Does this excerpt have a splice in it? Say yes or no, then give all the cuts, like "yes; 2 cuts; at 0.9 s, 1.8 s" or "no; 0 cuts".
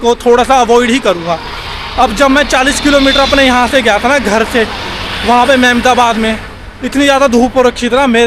no; 0 cuts